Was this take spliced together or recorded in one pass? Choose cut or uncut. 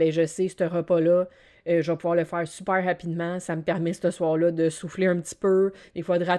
uncut